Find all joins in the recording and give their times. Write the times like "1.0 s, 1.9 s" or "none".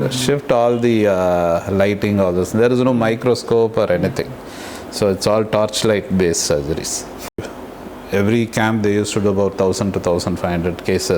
7.4 s

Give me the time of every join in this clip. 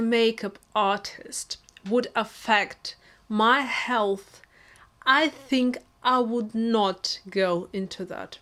none

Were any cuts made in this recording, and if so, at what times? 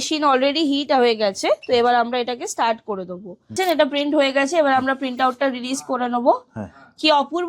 3.5 s

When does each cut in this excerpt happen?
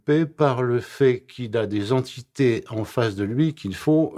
none

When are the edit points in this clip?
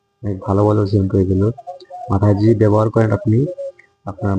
none

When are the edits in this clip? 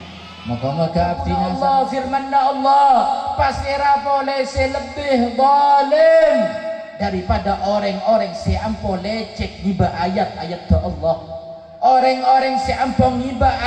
1.2 s

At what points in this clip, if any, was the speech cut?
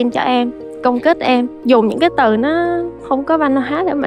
1.6 s, 3.0 s

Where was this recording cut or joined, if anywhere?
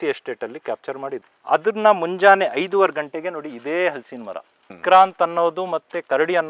4.8 s

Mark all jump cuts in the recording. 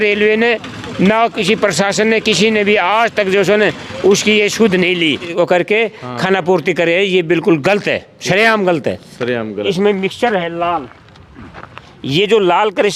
5.3 s, 9.6 s

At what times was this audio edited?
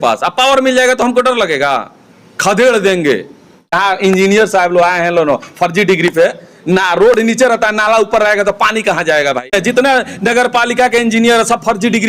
3.7 s, 9.5 s

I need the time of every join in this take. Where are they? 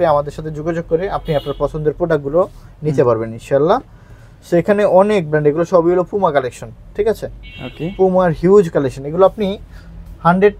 none

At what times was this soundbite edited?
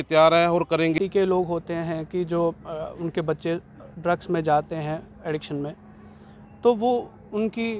1.0 s

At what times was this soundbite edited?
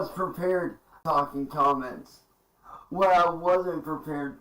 1.0 s

